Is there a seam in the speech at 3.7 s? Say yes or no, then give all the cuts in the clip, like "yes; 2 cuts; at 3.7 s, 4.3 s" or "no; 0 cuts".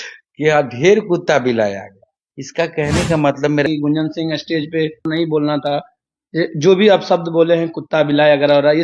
yes; 2 cuts; at 3.7 s, 5.1 s